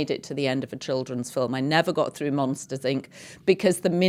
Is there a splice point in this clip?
no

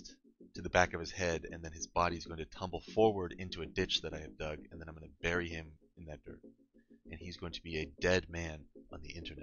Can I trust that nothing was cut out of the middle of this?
yes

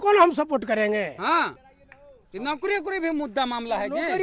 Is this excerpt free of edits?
yes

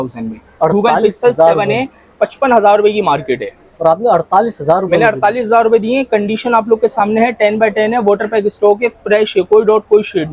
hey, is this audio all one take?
yes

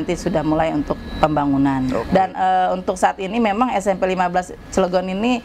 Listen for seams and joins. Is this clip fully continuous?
no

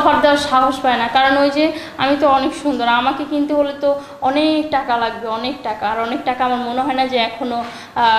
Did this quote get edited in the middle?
no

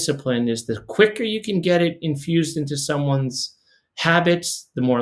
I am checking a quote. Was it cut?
no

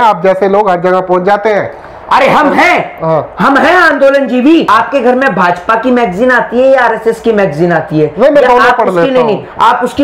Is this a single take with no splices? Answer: no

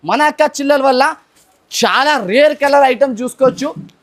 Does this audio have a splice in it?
no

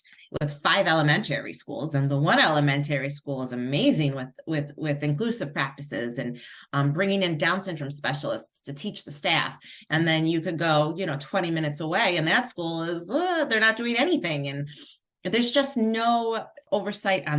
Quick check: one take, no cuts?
yes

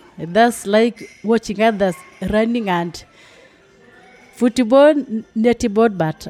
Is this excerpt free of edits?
yes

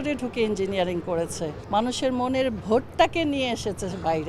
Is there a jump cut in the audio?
yes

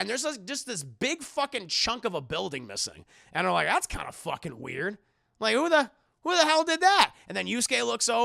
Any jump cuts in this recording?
no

